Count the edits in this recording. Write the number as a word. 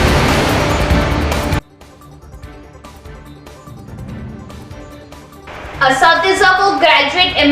one